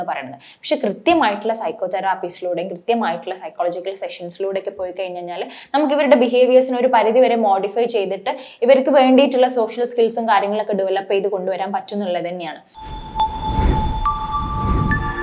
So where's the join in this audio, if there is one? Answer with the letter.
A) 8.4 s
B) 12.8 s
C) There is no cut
B